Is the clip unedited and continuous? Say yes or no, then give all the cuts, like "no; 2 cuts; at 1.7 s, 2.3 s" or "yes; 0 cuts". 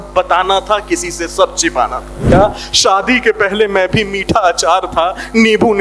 no; 1 cut; at 2.3 s